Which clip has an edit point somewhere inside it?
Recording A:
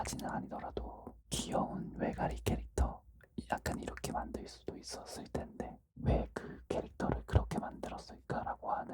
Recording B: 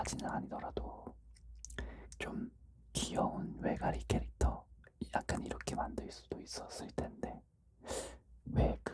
A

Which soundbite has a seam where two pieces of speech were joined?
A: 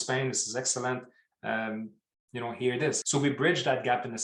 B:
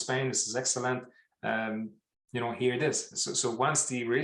A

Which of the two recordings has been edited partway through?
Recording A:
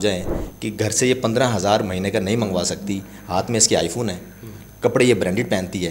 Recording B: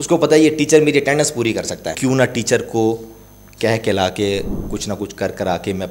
B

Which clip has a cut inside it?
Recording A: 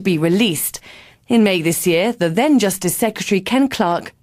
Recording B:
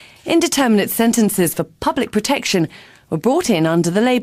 B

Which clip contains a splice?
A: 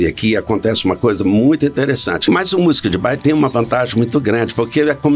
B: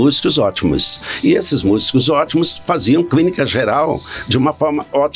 A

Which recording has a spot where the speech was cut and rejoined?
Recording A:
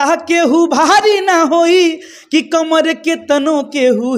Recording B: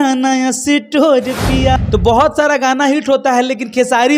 B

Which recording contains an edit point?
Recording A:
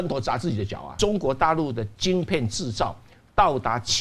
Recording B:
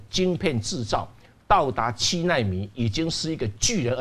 A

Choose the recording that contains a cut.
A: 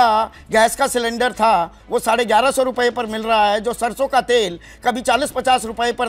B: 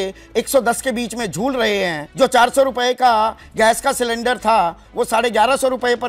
B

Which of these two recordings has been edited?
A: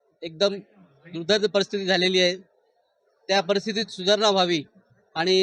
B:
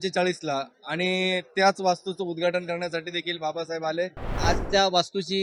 B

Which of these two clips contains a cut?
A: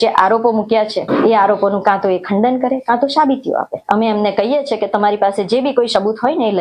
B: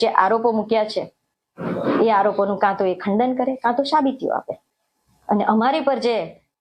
A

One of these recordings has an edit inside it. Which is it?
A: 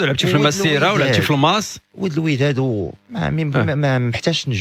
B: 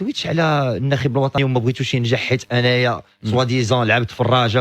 B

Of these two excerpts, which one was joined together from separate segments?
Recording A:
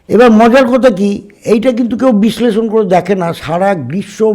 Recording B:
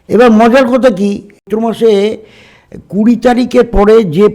B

